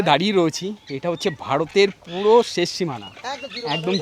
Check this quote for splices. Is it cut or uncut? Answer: uncut